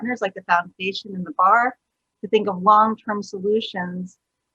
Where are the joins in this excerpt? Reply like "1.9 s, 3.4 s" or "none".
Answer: none